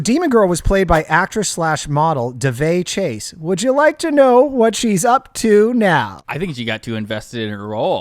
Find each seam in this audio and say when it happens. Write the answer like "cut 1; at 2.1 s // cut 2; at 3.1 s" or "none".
cut 1; at 6.2 s